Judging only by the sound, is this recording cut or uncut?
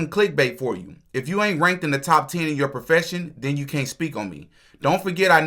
uncut